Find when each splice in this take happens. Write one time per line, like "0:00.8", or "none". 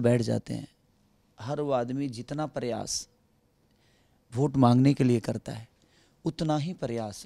none